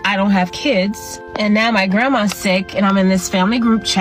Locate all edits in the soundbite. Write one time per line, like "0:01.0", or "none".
none

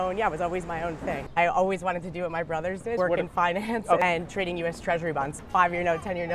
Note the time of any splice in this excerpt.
0:01.2
0:03.0
0:04.0
0:05.3

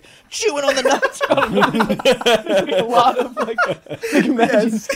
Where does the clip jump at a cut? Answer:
none

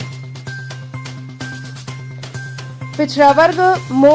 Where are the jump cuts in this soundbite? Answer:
0:01.5

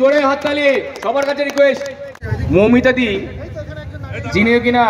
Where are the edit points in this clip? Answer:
0:02.1

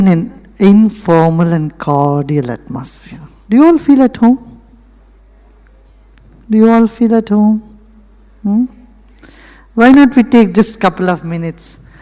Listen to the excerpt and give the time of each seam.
0:05.9

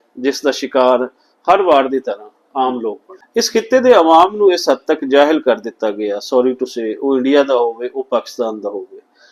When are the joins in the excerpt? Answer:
0:03.1

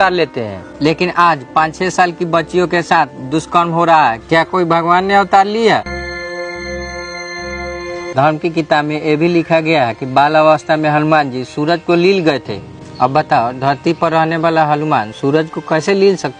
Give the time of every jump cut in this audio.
none

